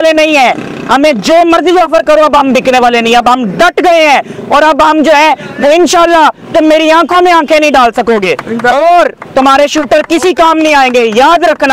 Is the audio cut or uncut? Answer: uncut